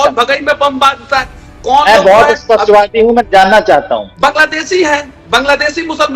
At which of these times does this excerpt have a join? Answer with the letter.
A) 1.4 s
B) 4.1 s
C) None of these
B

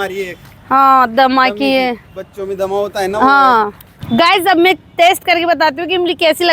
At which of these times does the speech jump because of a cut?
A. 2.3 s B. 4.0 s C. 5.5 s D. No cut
B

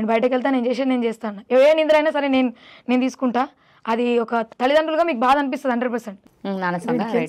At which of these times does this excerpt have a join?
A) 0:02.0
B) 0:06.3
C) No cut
B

